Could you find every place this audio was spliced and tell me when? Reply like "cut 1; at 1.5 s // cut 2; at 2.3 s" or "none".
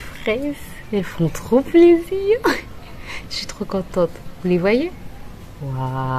none